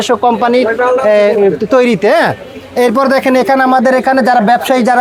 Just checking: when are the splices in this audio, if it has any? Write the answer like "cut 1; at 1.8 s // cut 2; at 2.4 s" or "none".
none

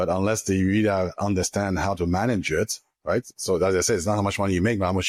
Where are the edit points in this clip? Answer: none

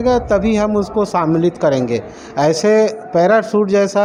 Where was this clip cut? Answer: none

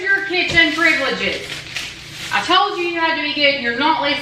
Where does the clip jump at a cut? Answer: none

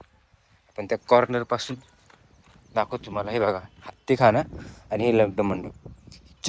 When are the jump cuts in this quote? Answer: none

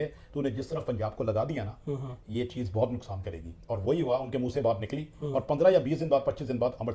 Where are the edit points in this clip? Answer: none

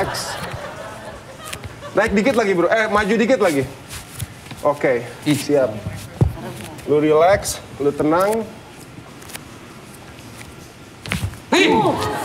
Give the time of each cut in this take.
none

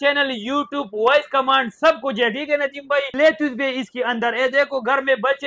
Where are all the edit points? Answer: cut 1; at 3.1 s

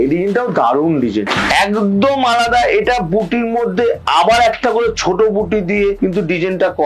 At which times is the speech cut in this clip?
cut 1; at 1.4 s // cut 2; at 6.0 s

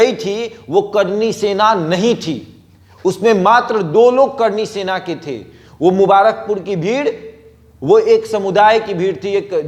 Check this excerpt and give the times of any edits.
none

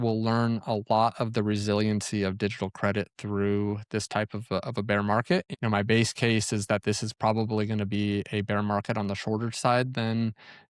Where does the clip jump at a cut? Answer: cut 1; at 5.5 s

